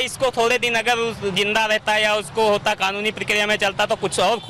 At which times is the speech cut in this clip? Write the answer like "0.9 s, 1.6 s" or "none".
none